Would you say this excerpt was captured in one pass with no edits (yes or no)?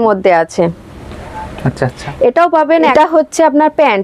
no